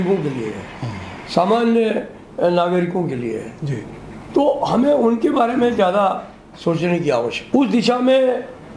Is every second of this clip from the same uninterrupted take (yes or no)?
no